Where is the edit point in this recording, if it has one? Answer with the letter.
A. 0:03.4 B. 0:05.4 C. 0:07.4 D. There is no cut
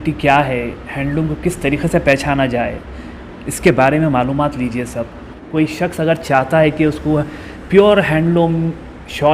B